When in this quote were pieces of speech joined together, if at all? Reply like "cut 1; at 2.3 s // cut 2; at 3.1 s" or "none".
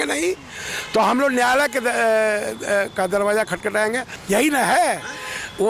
cut 1; at 4.1 s